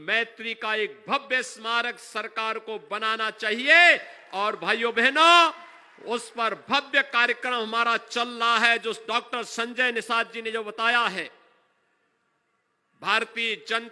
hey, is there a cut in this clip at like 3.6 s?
no; 0 cuts

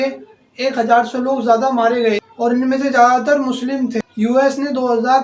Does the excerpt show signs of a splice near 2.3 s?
no; 0 cuts

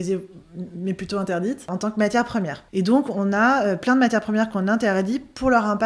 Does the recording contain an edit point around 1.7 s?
yes; 2 cuts; at 1.7 s, 2.6 s

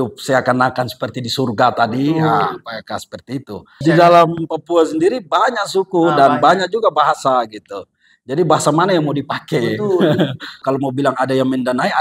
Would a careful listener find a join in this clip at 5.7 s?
no; 2 cuts; at 3.8 s, 10.6 s

